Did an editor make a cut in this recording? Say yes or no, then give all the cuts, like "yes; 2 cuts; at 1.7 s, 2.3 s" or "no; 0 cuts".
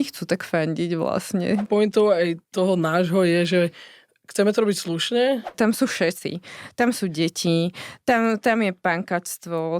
yes; 2 cuts; at 1.7 s, 5.5 s